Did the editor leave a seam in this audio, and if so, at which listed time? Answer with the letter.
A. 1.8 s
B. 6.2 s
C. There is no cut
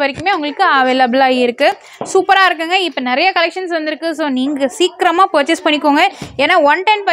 C